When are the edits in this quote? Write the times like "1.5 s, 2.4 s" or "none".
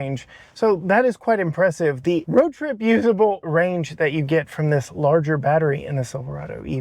2.2 s, 3.4 s